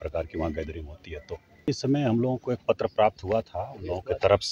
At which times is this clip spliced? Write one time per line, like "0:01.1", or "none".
0:01.7